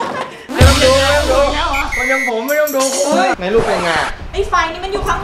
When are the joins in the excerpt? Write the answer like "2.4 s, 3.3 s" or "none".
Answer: 3.4 s